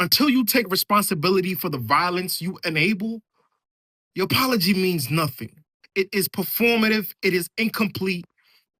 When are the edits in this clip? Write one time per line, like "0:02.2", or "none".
none